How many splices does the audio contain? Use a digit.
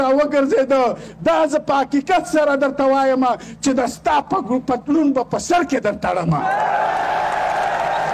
0